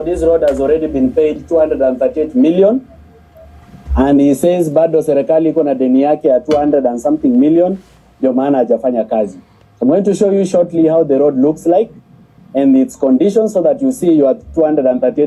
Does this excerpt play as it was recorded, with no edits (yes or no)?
yes